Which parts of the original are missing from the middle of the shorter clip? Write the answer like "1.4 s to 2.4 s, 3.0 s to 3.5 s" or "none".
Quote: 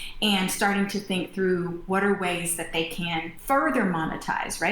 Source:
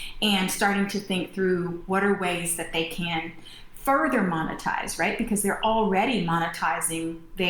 3.3 s to 3.7 s